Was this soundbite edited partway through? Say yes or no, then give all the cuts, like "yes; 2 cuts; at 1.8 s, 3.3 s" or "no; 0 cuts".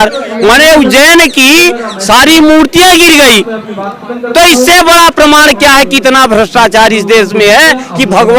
no; 0 cuts